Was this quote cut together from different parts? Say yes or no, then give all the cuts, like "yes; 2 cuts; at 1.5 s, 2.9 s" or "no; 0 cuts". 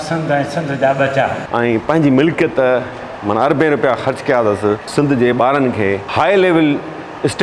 yes; 1 cut; at 1.5 s